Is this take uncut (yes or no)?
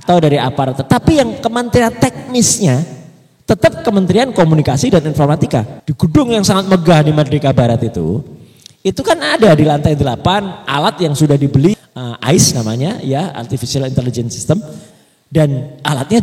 no